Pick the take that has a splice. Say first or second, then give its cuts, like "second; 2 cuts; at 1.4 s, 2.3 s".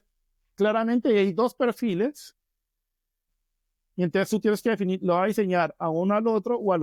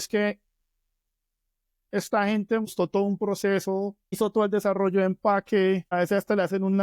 second; 3 cuts; at 2.7 s, 4.2 s, 5.9 s